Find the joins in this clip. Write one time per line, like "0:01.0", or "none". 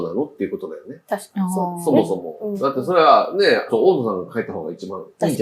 0:03.7